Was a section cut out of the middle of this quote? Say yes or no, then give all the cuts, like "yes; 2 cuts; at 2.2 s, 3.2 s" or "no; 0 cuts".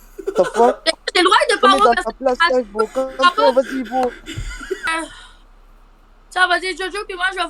yes; 1 cut; at 4.9 s